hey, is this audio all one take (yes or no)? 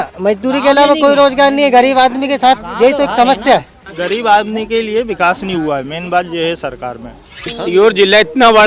yes